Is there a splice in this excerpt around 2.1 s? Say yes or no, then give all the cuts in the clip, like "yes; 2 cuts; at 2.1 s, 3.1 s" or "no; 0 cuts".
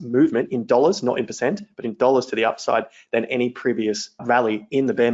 no; 1 cut; at 4.2 s